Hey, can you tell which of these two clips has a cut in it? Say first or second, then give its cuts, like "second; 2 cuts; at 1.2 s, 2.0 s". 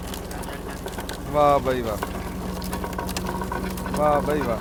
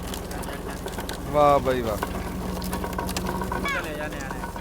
second; 1 cut; at 3.7 s